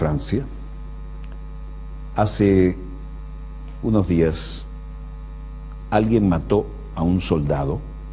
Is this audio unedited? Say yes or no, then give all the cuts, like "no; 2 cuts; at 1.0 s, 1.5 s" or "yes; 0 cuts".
no; 1 cut; at 4.4 s